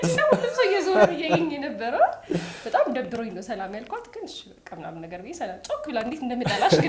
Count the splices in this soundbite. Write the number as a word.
zero